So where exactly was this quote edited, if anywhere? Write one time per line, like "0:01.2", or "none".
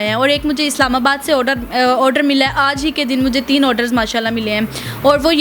none